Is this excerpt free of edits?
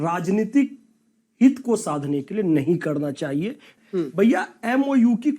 no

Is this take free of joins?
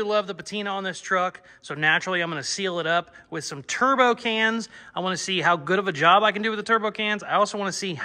yes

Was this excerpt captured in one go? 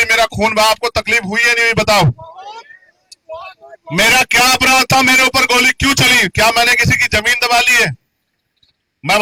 yes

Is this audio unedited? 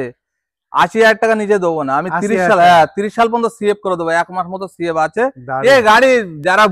yes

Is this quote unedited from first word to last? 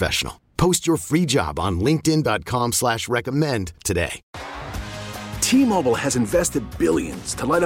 no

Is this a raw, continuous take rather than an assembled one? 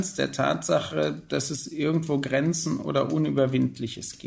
yes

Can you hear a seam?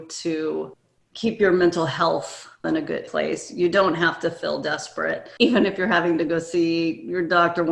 yes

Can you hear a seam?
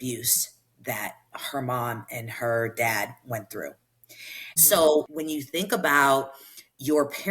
yes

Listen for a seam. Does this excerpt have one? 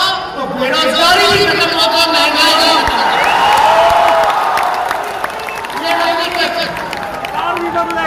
no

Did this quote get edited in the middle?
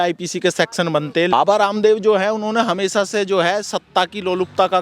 yes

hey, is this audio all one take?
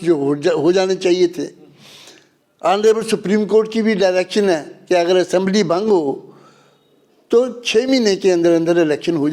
yes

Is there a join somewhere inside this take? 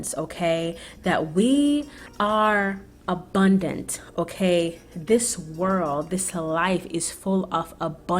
yes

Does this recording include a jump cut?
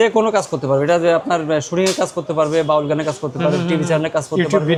no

